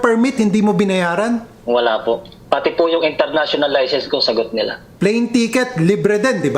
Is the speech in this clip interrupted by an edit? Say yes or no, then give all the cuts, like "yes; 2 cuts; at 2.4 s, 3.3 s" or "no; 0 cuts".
yes; 3 cuts; at 1.5 s, 2.3 s, 4.8 s